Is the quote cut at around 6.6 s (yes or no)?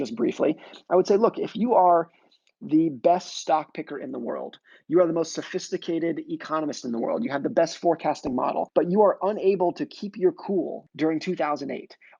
no